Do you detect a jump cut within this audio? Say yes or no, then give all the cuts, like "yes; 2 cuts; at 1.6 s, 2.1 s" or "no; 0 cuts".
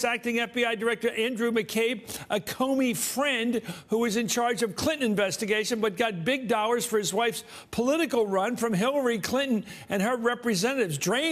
yes; 1 cut; at 10.0 s